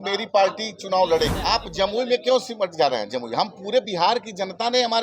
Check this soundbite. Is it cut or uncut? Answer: cut